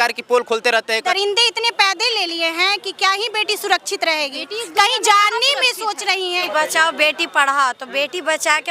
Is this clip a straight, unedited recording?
no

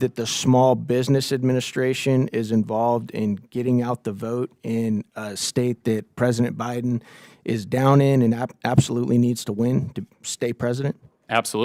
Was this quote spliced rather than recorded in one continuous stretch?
no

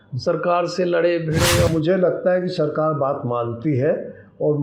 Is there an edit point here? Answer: yes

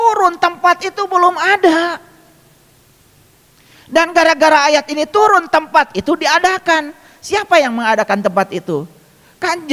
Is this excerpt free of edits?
yes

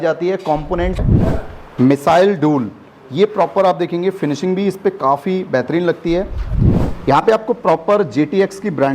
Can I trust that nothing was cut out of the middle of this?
no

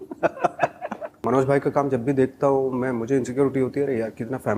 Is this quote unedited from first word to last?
no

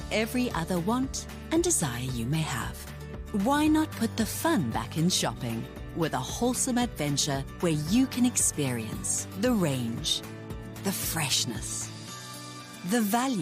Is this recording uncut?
yes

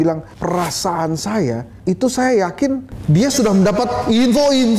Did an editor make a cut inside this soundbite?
no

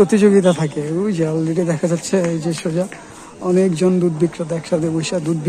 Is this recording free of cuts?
yes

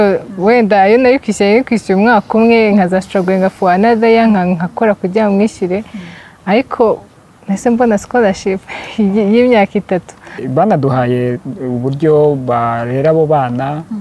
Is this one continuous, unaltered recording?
no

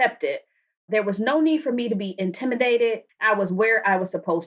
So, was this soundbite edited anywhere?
yes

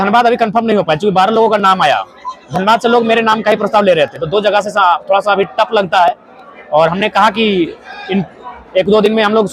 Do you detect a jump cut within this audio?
no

